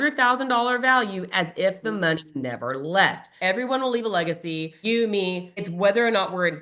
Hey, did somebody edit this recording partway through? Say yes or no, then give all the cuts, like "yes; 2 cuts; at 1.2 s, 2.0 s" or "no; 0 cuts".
yes; 3 cuts; at 3.3 s, 4.7 s, 5.6 s